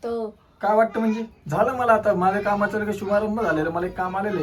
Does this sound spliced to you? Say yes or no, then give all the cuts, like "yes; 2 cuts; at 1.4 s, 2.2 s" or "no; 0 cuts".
no; 0 cuts